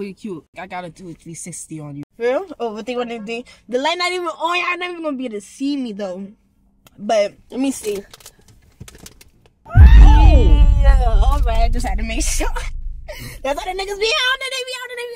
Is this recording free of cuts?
yes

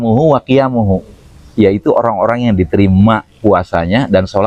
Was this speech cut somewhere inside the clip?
no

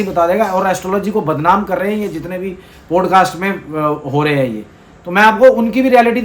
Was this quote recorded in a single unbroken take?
yes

